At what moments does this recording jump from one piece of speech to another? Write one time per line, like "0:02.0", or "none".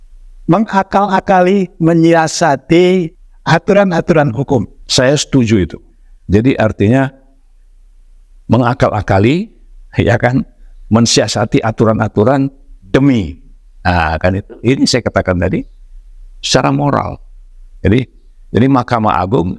0:03.1
0:04.8